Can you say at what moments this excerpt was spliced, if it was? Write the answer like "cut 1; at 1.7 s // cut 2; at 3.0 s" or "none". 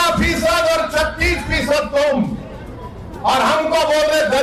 none